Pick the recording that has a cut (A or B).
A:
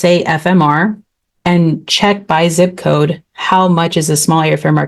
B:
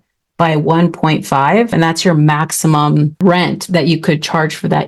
B